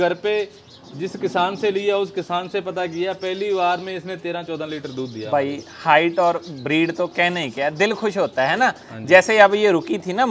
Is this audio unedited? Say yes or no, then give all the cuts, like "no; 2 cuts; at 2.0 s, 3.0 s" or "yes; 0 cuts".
yes; 0 cuts